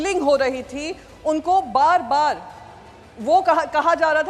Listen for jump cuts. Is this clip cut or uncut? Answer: uncut